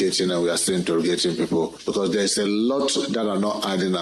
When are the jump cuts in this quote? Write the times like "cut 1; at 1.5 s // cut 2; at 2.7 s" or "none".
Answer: cut 1; at 1.8 s